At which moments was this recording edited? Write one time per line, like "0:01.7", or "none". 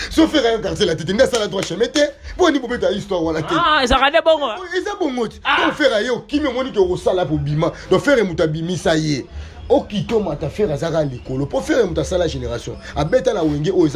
none